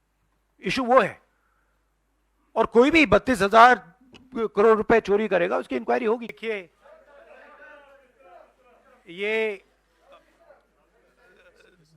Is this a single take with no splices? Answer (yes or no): no